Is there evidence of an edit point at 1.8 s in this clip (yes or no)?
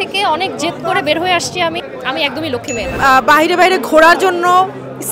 yes